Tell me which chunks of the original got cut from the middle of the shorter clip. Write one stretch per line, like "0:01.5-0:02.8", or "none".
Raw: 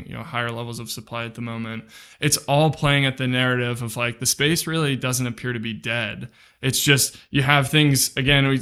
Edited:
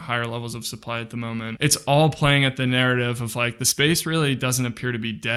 0:01.8-0:02.2